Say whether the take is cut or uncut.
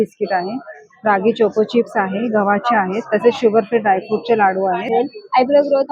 cut